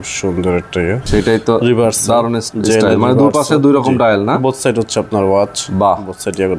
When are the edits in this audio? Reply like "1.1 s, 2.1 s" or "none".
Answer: 1.0 s, 2.5 s